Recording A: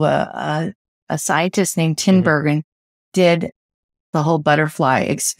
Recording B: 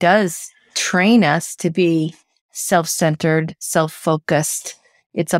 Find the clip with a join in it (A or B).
A